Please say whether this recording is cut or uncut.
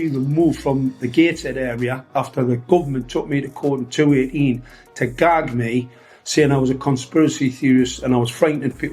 uncut